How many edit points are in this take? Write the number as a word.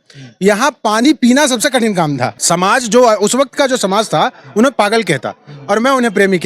one